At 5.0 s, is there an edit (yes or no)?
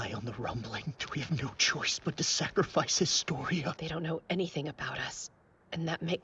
no